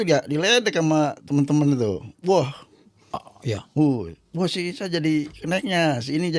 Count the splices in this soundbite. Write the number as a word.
zero